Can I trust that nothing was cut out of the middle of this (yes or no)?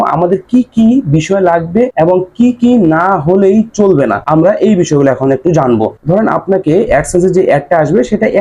no